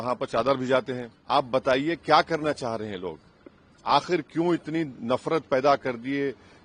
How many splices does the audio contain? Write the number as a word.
one